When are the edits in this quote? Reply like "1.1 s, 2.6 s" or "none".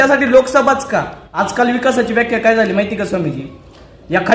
1.2 s